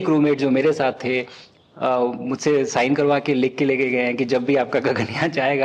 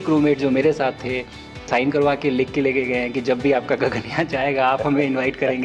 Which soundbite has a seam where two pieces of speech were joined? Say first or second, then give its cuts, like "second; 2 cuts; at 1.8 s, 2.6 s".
second; 1 cut; at 1.7 s